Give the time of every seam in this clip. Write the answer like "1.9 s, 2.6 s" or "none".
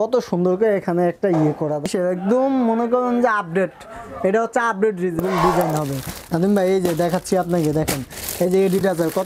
1.8 s, 5.2 s